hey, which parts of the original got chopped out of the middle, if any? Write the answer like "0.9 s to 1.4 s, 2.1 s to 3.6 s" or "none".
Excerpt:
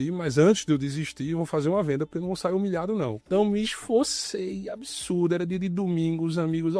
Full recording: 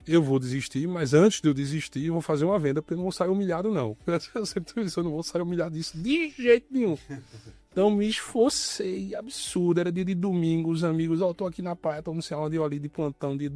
3.9 s to 7.6 s